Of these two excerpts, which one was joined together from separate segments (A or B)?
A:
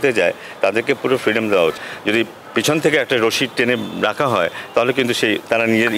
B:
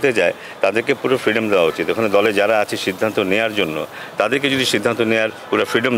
A